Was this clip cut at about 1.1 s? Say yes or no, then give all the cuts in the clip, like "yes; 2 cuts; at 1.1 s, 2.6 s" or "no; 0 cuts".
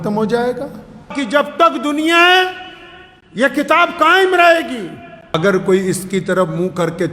yes; 2 cuts; at 1.1 s, 5.4 s